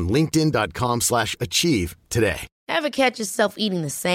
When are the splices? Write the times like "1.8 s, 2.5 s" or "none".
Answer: 2.5 s